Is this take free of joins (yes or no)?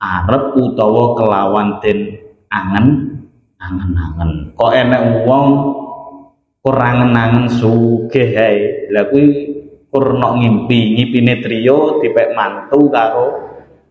yes